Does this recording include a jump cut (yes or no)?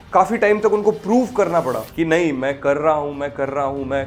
no